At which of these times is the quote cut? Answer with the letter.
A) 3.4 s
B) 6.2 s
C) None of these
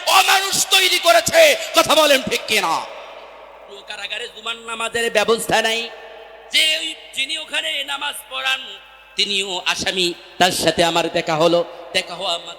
A